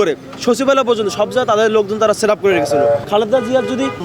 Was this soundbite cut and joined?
yes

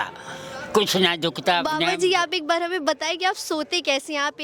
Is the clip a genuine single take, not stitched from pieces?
no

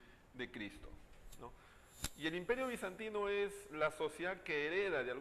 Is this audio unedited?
no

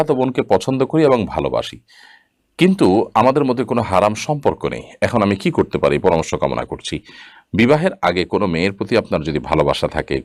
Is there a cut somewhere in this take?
no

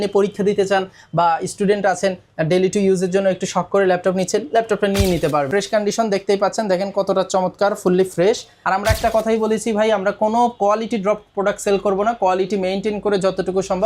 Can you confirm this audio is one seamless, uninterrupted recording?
no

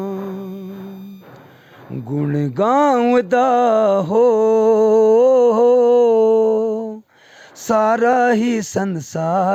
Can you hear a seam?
no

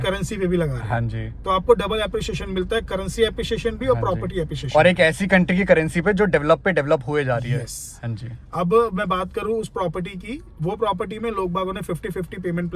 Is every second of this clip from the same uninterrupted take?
yes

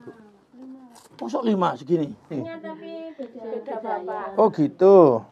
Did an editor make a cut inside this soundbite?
yes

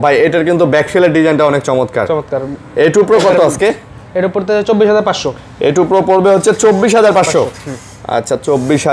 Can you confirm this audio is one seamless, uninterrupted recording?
yes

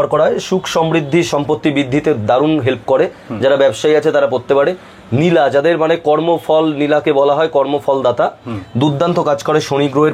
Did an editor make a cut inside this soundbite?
no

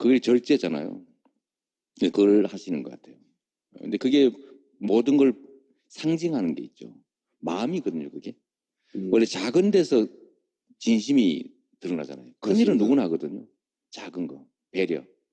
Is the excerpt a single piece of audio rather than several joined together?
yes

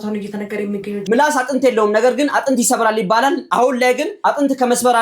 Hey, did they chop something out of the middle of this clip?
yes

